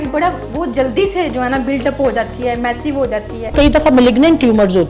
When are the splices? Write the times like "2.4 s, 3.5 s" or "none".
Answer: 3.5 s